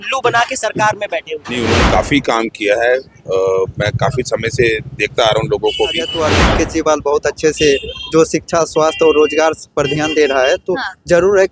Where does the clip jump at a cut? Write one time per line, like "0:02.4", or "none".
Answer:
0:01.4
0:06.1